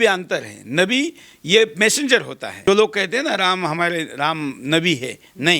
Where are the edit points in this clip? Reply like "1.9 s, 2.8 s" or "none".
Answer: 2.6 s